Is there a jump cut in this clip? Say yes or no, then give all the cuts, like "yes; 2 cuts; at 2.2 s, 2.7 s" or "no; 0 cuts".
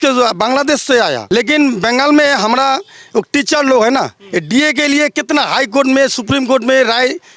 yes; 1 cut; at 1.2 s